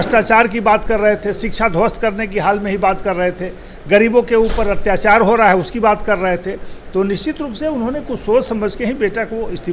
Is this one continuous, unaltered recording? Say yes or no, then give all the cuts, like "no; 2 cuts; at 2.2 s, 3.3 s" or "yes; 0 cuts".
yes; 0 cuts